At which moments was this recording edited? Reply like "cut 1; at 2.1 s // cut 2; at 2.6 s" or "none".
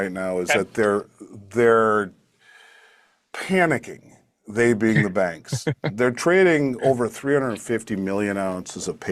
none

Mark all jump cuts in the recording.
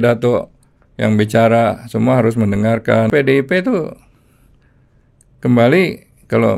cut 1; at 3.1 s

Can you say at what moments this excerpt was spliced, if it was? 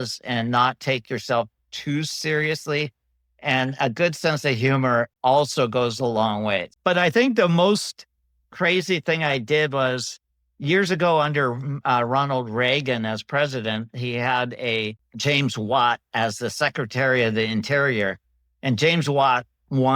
cut 1; at 6.7 s // cut 2; at 15.1 s

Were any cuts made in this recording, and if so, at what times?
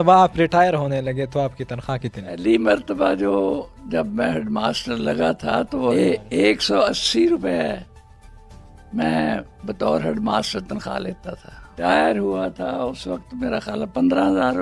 cut 1; at 2.4 s // cut 2; at 5.9 s // cut 3; at 11.8 s

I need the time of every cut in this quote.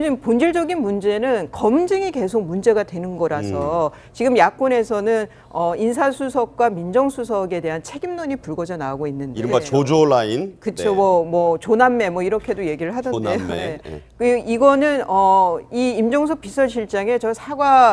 cut 1; at 4.0 s

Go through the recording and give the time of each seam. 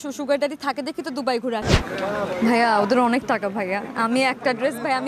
cut 1; at 1.7 s

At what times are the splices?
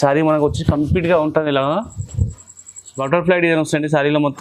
cut 1; at 3.0 s

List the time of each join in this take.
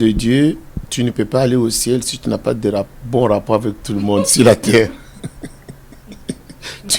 none

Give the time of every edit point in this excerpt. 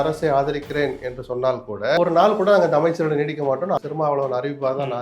cut 1; at 2.0 s // cut 2; at 3.8 s

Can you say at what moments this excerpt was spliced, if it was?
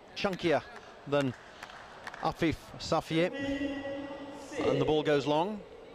none

